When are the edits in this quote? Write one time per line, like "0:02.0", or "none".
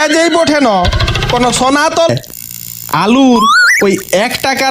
0:02.1